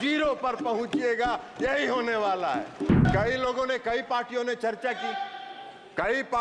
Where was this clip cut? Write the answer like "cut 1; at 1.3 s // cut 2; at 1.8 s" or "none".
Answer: cut 1; at 3.0 s